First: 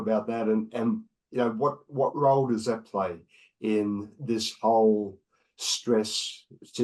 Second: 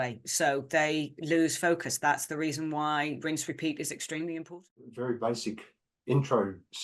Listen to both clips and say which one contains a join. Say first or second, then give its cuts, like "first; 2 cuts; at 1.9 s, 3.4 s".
second; 1 cut; at 4.5 s